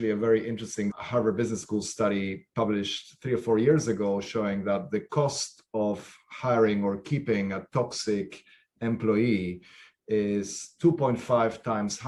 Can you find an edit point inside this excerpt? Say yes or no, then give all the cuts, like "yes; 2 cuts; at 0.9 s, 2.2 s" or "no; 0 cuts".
no; 0 cuts